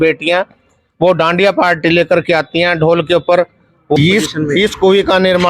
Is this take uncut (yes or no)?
no